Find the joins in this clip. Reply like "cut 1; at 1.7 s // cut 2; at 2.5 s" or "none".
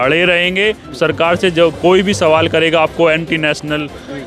cut 1; at 1.0 s